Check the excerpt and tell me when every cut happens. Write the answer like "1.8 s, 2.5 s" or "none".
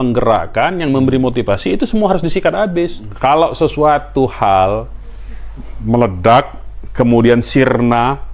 3.1 s